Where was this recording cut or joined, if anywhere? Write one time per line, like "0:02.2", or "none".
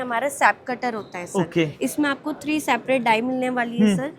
none